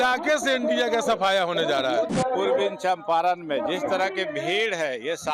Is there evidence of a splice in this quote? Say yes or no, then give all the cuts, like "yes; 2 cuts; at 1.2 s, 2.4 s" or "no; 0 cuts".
yes; 1 cut; at 2.1 s